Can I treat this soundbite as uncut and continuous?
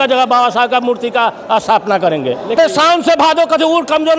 no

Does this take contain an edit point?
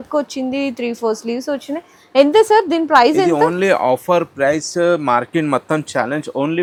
no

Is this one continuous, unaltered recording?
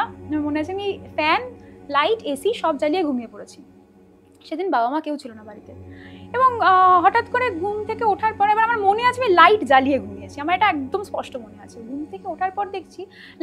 yes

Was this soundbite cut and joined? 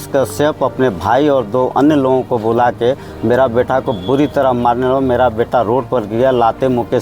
no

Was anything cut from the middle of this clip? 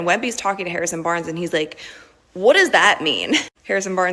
yes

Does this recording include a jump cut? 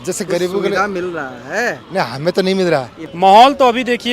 yes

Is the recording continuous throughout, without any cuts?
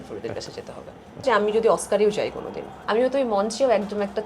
no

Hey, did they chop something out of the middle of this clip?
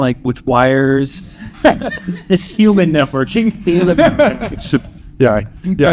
no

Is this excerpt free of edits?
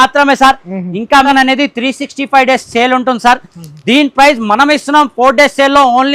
no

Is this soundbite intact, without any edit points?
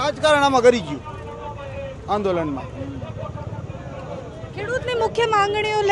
yes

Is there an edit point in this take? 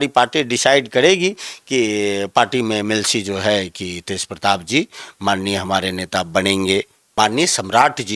yes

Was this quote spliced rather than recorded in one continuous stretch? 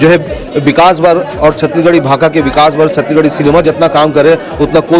no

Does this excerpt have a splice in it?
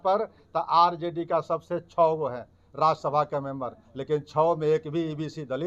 no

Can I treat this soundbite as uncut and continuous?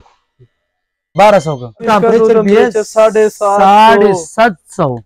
no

